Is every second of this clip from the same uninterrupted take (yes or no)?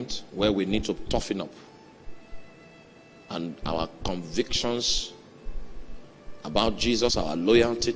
yes